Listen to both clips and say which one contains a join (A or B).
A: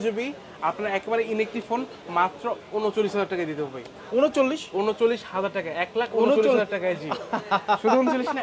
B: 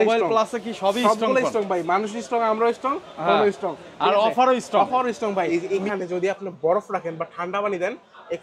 B